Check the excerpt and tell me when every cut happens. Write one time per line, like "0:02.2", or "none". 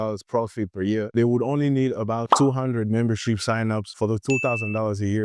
0:03.9